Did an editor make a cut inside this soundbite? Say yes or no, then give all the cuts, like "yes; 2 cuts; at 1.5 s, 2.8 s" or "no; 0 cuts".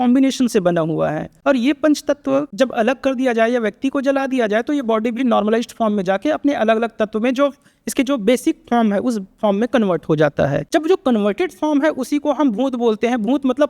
yes; 3 cuts; at 1.3 s, 2.5 s, 10.6 s